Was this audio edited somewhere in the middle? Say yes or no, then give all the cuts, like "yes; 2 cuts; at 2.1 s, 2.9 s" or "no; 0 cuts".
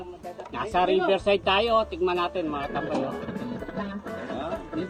no; 0 cuts